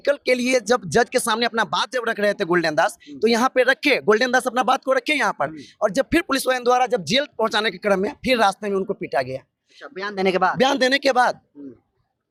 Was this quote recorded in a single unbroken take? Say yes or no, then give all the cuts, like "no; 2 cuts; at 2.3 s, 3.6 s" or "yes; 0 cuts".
yes; 0 cuts